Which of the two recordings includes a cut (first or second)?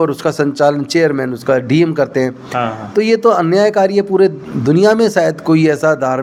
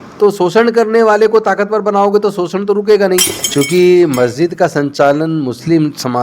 second